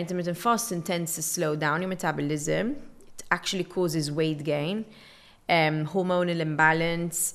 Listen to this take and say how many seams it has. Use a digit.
0